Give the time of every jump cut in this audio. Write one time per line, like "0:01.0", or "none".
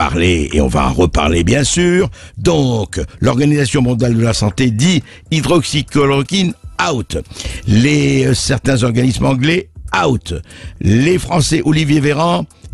none